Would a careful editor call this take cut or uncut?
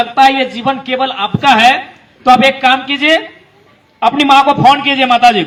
uncut